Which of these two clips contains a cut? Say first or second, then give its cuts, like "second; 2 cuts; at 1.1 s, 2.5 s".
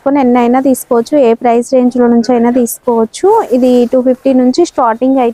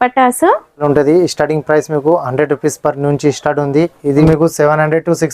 second; 2 cuts; at 0.8 s, 4.3 s